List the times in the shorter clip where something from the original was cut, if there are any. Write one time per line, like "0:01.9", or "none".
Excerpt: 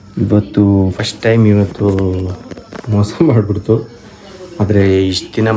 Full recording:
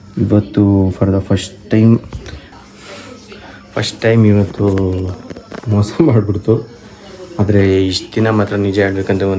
0:00.9